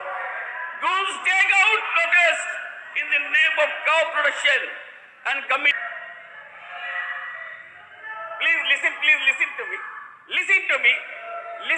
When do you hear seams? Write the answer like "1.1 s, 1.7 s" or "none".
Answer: 5.8 s

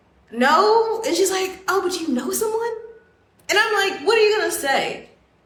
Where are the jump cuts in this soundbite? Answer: none

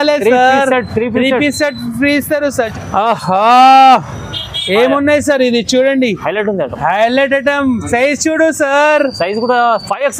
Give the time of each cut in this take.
2.7 s

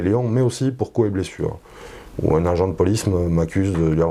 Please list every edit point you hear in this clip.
none

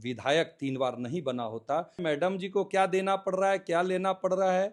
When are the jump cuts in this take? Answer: 2.0 s

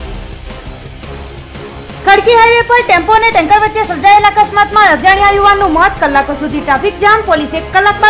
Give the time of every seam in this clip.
2.0 s

